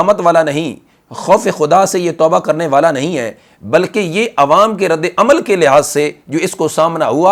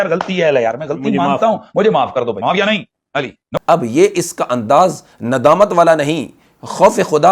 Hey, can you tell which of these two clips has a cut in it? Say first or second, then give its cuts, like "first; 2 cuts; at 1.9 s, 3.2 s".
second; 1 cut; at 3.6 s